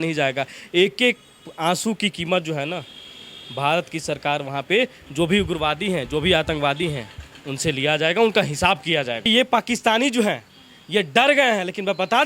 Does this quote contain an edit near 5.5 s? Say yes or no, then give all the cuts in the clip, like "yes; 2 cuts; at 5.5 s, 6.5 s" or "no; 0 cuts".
no; 1 cut; at 9.3 s